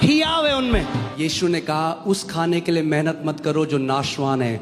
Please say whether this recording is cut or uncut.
cut